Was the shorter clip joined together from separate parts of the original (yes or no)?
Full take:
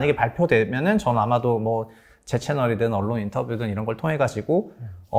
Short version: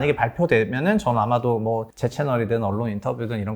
yes